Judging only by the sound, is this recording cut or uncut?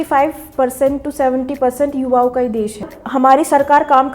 cut